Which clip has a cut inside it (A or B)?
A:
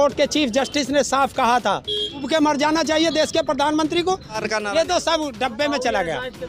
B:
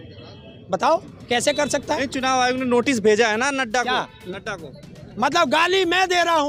A